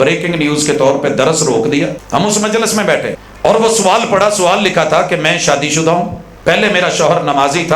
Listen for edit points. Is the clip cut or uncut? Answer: cut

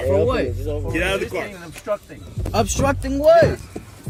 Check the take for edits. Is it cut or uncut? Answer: uncut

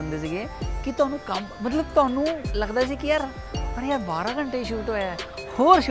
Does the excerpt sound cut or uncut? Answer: uncut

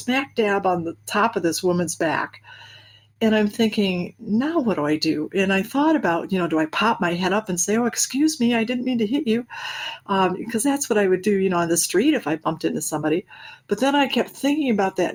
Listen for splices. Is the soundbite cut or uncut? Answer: uncut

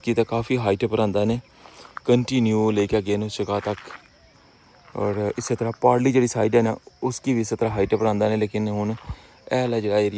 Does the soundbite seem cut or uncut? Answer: uncut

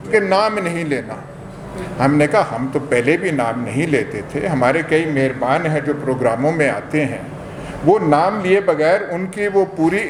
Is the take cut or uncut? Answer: uncut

